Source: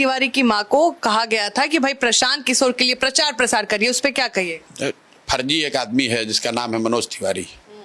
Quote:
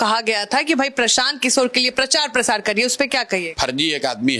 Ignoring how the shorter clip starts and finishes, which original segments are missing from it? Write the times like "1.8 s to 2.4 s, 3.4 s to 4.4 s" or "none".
4.5 s to 5.2 s